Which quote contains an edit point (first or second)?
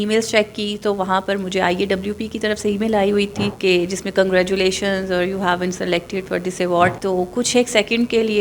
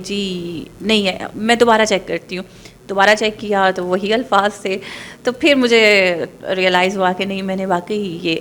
first